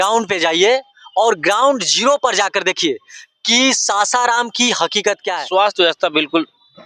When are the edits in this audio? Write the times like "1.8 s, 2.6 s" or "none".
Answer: 5.3 s